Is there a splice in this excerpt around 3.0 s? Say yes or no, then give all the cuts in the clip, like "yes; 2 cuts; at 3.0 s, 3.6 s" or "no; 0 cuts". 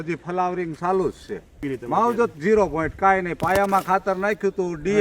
no; 1 cut; at 1.7 s